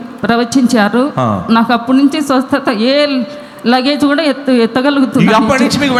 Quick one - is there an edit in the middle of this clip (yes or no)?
no